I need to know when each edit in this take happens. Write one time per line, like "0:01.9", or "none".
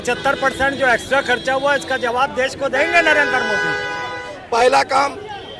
0:04.3